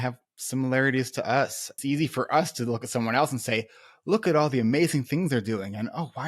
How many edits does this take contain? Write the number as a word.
one